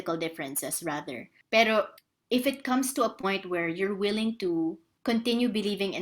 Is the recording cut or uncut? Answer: cut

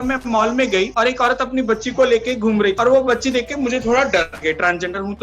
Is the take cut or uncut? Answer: cut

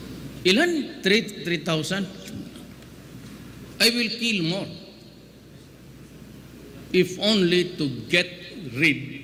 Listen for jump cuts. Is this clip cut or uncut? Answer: uncut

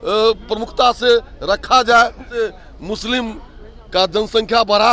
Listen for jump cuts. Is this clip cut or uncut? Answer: cut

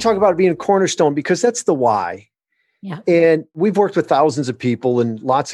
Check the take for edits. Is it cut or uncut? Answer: cut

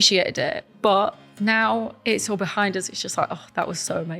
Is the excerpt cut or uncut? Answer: uncut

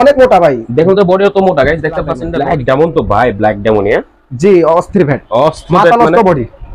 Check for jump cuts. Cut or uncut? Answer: cut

